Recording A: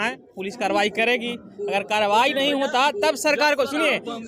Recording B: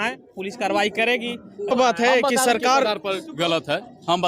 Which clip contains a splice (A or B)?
B